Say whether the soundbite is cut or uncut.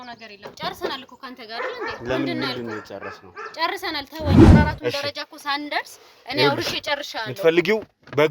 cut